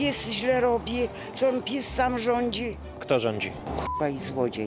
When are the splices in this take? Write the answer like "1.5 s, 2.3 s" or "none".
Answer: 3.5 s

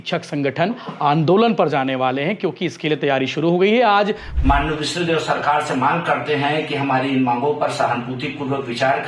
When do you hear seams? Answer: 4.3 s

